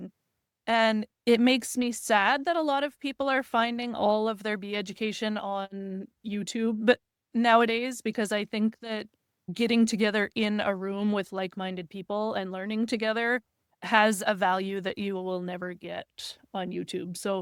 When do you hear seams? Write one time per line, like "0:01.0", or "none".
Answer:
none